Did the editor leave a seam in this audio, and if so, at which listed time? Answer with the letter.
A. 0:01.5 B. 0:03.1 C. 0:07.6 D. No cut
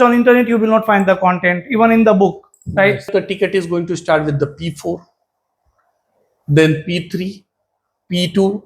B